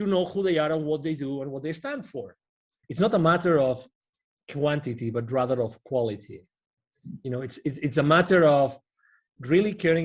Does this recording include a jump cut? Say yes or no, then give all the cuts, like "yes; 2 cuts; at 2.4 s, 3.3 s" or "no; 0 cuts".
yes; 1 cut; at 2.7 s